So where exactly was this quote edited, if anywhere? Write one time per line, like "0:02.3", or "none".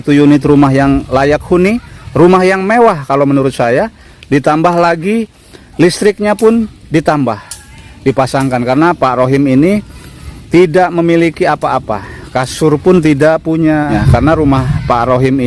0:14.0